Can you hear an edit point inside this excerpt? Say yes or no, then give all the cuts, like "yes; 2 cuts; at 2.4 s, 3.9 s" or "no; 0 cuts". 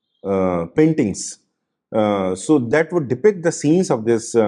no; 0 cuts